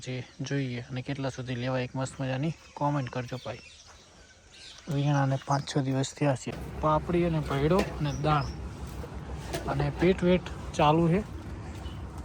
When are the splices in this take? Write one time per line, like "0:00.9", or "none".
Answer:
0:06.4